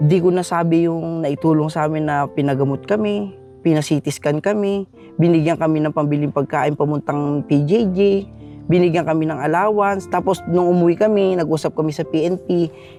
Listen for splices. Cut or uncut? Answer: uncut